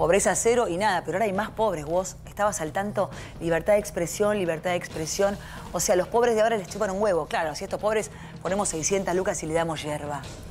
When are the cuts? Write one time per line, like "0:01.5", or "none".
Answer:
none